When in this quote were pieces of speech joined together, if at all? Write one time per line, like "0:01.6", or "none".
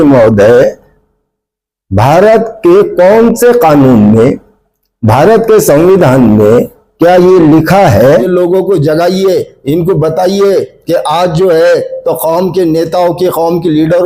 0:08.3